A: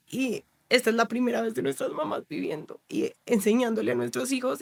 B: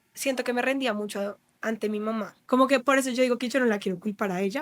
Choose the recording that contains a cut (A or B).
B